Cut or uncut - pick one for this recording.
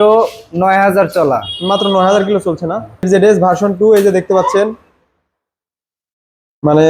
cut